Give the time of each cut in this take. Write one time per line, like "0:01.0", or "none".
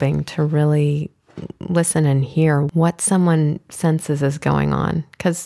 0:02.7